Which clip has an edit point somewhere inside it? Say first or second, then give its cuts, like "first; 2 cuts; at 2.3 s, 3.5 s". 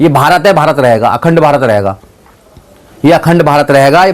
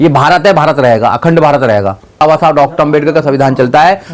second; 1 cut; at 2.2 s